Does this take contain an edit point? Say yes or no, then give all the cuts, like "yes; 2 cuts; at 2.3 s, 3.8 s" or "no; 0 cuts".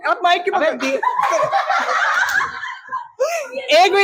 no; 0 cuts